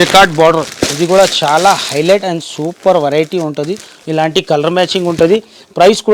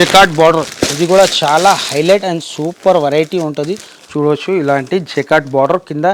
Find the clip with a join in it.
first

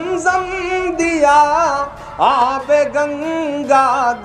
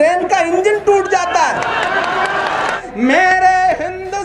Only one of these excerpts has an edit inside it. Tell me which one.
second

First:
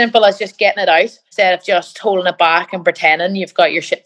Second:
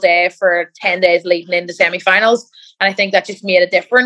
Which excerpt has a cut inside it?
first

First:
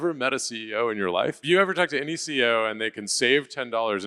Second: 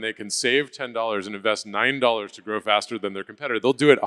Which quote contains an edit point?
first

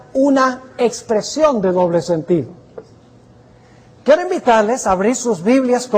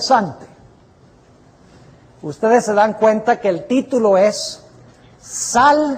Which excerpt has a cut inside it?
first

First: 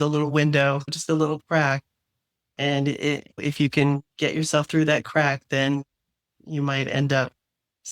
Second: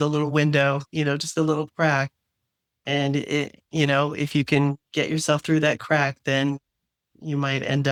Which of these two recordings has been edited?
first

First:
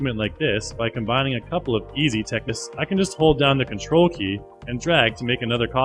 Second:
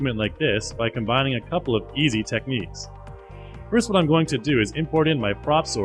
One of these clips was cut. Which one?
second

